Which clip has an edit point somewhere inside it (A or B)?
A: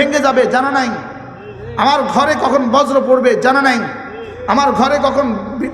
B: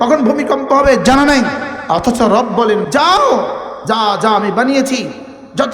B